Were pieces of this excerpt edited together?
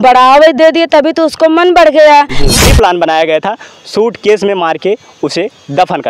yes; 1 cut; at 2.4 s

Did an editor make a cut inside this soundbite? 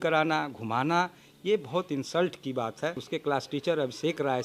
yes; 1 cut; at 3.1 s

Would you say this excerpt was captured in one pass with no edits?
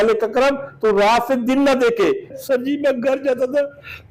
no; 1 cut; at 2.4 s

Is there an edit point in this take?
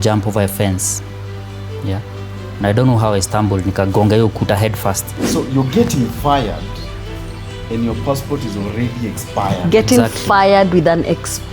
yes; 1 cut; at 5.2 s

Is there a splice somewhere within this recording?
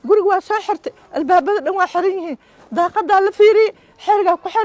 no; 0 cuts

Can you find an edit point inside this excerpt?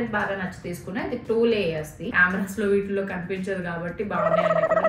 yes; 1 cut; at 2.1 s

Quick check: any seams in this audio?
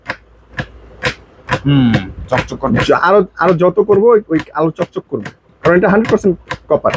no; 0 cuts

